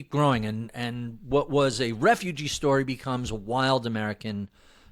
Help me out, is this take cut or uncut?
uncut